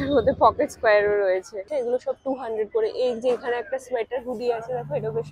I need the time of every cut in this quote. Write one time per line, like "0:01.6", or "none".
0:01.6

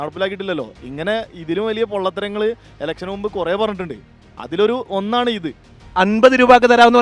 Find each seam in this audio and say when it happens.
0:06.0

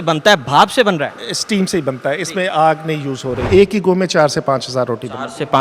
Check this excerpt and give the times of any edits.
0:03.5

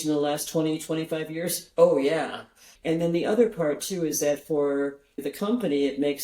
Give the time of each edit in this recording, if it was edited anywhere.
0:02.6
0:05.2

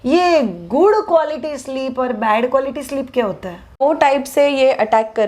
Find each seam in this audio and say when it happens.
0:03.8

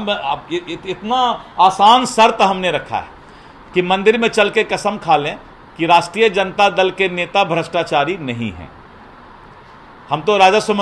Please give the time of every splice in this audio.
none

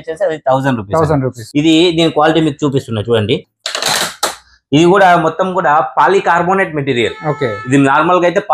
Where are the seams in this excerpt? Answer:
0:01.4

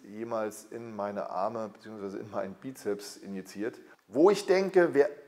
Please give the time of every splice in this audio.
0:03.9

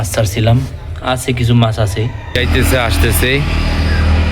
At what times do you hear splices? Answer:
0:02.4

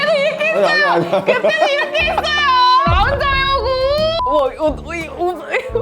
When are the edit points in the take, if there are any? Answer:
0:02.8
0:04.2

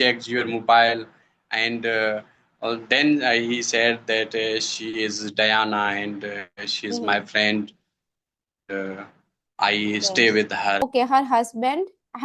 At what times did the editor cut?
0:10.8

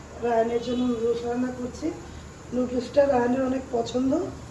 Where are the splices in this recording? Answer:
none

